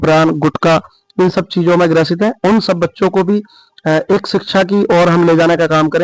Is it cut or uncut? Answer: uncut